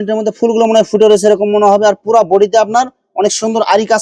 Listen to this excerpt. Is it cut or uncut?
uncut